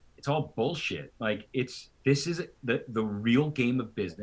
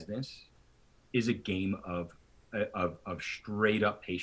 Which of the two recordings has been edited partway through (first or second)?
first